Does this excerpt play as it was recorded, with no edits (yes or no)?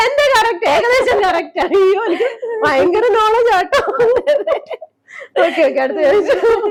yes